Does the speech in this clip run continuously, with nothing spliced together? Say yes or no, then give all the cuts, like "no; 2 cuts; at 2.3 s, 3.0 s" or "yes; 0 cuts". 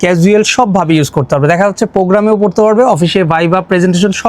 yes; 0 cuts